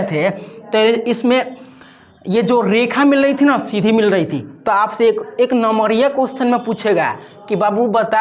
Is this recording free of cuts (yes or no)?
yes